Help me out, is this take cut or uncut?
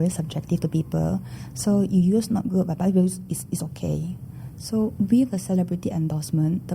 uncut